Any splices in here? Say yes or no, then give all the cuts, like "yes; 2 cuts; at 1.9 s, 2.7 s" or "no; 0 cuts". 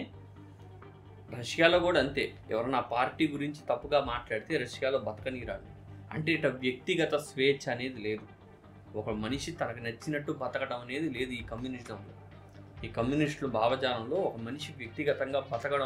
no; 0 cuts